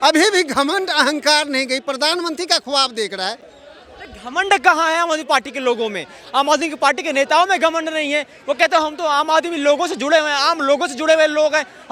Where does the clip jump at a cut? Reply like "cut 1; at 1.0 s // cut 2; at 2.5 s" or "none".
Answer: none